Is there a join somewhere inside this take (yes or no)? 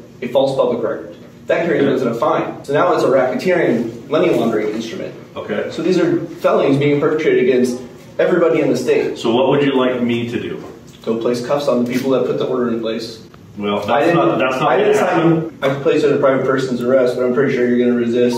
yes